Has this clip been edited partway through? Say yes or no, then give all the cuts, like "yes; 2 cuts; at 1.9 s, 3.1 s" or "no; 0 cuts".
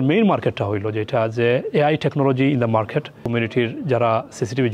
yes; 1 cut; at 3.2 s